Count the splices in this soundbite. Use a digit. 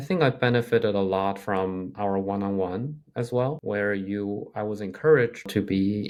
0